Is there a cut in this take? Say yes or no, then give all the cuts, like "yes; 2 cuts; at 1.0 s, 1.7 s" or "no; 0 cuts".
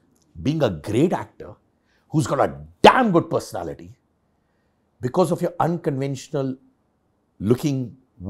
no; 0 cuts